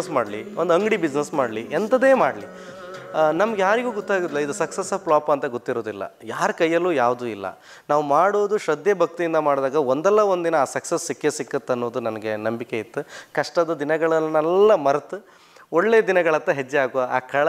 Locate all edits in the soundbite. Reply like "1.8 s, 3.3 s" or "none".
none